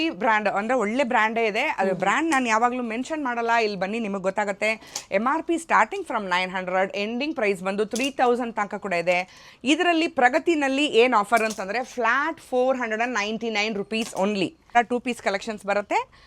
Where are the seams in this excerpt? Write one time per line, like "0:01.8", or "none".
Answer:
0:14.7